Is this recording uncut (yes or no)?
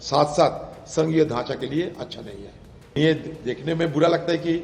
no